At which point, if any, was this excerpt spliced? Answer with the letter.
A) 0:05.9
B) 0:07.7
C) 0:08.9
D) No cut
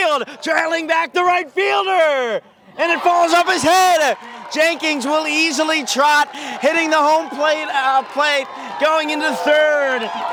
D